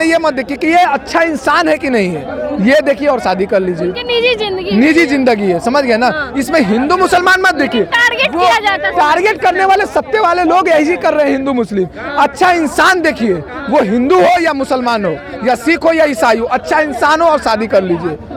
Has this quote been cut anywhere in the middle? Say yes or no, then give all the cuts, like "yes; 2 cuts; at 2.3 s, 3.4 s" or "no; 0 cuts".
no; 0 cuts